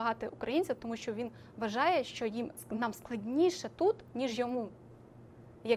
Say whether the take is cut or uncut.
uncut